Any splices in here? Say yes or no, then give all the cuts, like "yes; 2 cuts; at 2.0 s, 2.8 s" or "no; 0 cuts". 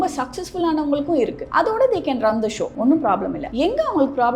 yes; 3 cuts; at 1.4 s, 2.7 s, 3.4 s